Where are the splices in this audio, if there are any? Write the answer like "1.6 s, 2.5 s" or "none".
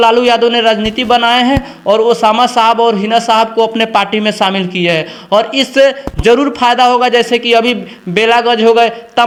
none

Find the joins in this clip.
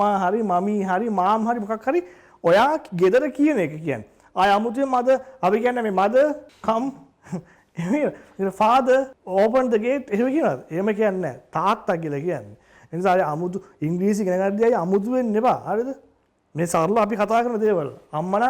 6.5 s, 9.2 s

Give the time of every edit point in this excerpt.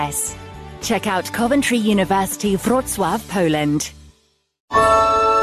4.5 s

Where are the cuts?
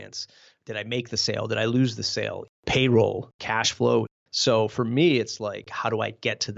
2.5 s, 3.3 s, 4.2 s, 5.7 s

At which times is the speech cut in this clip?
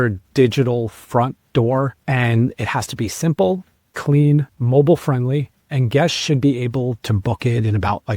2.0 s, 4.5 s, 5.8 s

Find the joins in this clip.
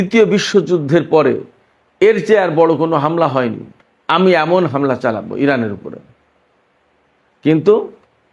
none

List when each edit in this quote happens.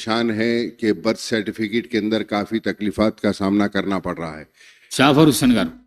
4.9 s

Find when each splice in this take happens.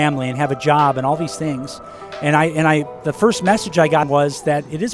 4.0 s

